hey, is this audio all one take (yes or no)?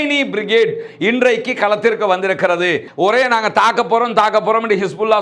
no